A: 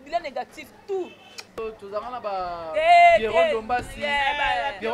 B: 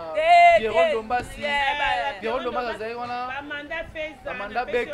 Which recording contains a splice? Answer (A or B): A